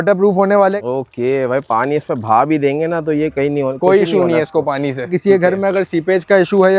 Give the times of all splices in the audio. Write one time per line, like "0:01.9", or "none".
0:00.8
0:05.1